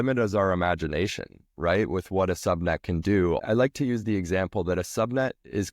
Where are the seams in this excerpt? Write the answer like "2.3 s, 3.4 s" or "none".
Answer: 3.4 s